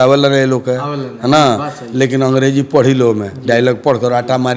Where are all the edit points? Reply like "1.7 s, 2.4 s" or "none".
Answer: none